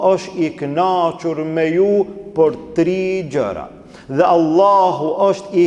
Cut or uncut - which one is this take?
uncut